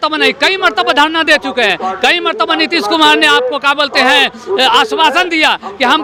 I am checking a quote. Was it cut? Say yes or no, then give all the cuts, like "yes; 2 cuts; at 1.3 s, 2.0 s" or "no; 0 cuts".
no; 0 cuts